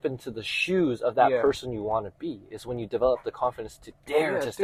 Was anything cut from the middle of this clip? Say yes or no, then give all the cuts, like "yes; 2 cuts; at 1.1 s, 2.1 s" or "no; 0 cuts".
no; 0 cuts